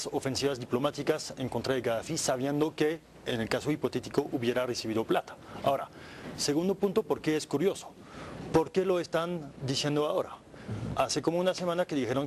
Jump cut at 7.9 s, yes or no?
yes